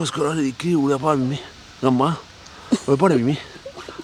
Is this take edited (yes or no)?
no